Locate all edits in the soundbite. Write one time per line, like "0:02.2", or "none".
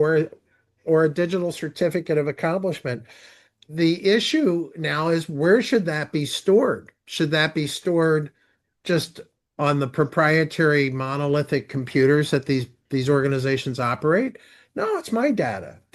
0:03.6